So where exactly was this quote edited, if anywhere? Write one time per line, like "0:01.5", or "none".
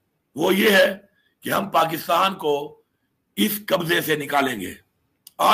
none